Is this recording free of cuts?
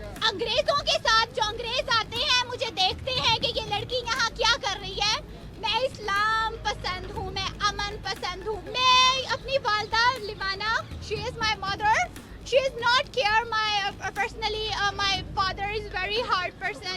no; 2 cuts; at 5.3 s, 8.6 s

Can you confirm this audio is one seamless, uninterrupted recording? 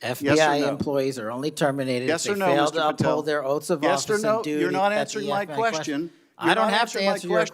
yes; 0 cuts

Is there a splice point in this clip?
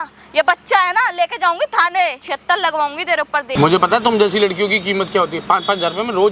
yes; 2 cuts; at 2.3 s, 3.5 s

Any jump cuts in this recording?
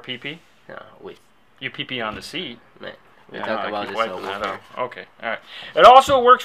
no; 0 cuts

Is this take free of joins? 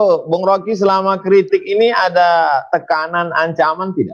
yes; 0 cuts

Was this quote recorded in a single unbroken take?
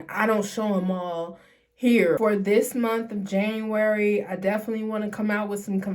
no; 1 cut; at 2.2 s

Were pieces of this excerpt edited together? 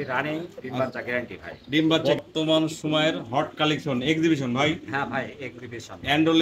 yes; 1 cut; at 2.0 s

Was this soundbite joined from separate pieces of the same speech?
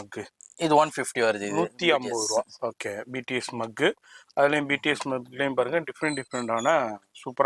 no; 0 cuts

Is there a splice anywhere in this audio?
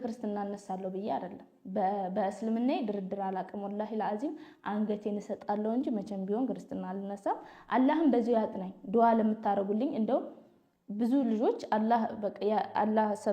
no; 0 cuts

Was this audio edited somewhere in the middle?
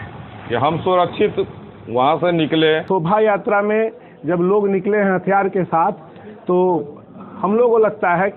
yes; 1 cut; at 2.8 s

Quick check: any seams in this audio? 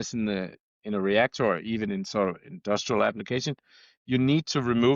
no; 0 cuts

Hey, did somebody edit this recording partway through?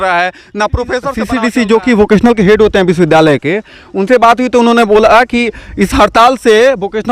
yes; 1 cut; at 1.3 s

